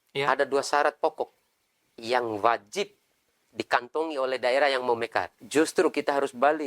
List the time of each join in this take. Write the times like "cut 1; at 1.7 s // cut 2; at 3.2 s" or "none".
cut 1; at 5.4 s